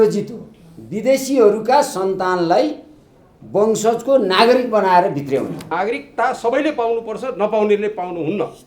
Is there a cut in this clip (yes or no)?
yes